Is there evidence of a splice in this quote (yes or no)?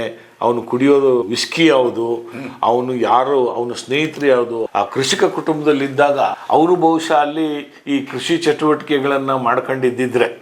yes